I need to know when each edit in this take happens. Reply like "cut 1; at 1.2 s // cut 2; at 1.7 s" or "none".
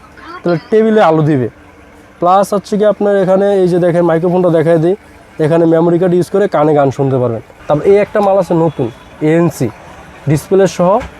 cut 1; at 7.5 s